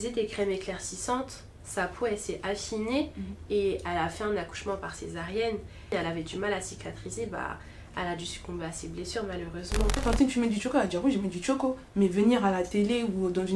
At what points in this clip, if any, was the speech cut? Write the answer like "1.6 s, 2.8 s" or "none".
5.9 s, 10.0 s